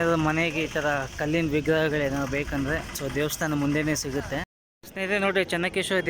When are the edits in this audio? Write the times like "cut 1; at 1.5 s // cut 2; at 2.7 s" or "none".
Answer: cut 1; at 4.6 s

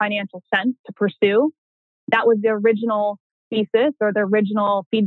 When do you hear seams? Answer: none

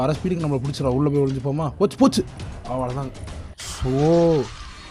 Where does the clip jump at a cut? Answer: none

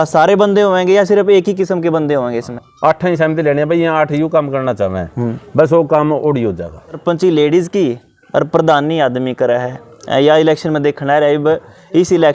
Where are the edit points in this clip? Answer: cut 1; at 2.6 s // cut 2; at 7.0 s

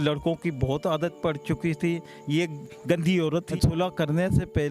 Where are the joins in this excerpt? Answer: cut 1; at 3.5 s

